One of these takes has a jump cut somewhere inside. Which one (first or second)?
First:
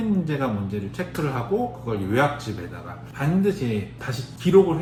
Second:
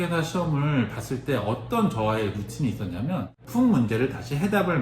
second